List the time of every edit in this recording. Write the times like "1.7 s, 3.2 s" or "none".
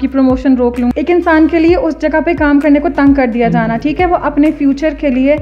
0.9 s